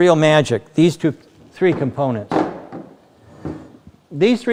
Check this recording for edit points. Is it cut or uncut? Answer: uncut